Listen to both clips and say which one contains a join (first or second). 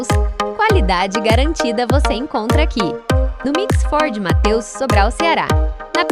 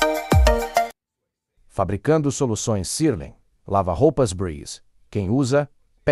second